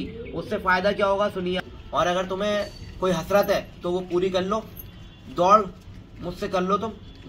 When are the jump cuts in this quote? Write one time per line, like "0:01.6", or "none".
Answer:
0:01.6